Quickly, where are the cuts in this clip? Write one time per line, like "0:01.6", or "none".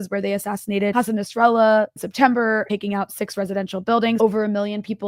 0:00.9
0:02.1
0:02.7
0:04.2